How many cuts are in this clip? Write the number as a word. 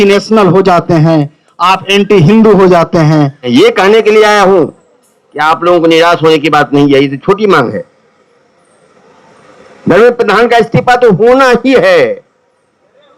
one